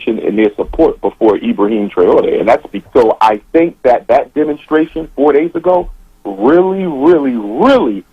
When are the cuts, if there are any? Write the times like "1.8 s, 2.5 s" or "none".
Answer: 2.7 s